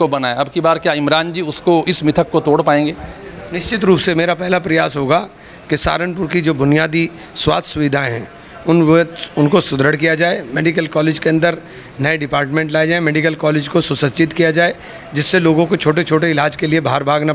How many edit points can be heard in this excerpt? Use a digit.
0